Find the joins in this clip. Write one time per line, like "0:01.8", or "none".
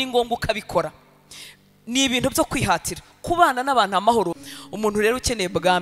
0:04.4